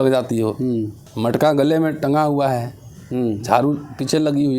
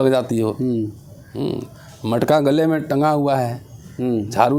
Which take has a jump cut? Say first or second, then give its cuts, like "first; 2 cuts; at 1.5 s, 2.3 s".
first; 1 cut; at 1.0 s